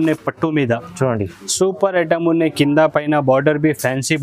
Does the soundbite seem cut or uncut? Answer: uncut